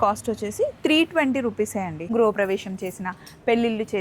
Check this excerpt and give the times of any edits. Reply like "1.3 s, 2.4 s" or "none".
2.0 s